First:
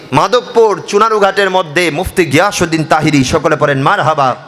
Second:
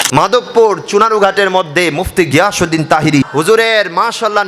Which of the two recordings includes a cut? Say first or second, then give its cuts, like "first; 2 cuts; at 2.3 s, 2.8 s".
second; 1 cut; at 3.3 s